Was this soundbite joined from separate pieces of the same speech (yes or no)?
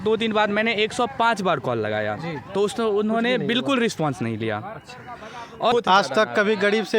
yes